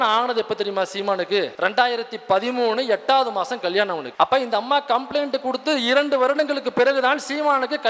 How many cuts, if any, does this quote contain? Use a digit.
2